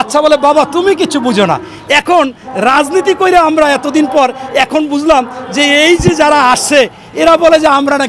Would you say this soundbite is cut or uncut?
uncut